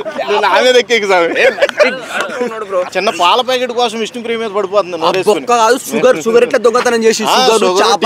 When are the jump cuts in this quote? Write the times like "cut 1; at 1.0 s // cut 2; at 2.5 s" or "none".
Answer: cut 1; at 2.9 s